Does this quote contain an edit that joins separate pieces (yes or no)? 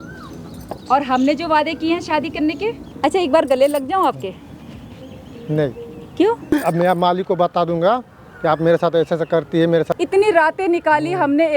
yes